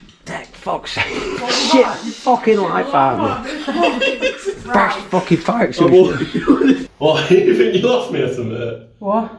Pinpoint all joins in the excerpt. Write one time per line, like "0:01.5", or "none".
0:06.8